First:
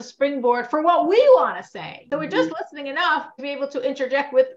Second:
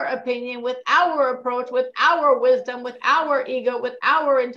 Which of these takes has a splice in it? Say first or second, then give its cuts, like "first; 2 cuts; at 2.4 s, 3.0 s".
first; 1 cut; at 3.3 s